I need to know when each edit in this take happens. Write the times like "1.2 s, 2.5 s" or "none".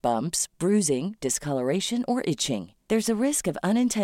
none